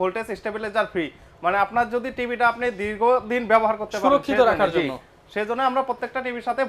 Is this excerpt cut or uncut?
uncut